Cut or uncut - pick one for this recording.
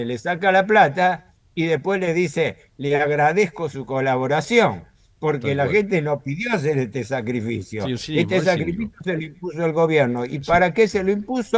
uncut